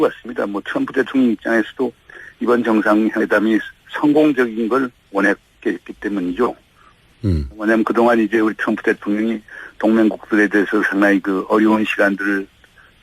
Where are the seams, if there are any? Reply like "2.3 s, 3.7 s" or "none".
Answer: 2.8 s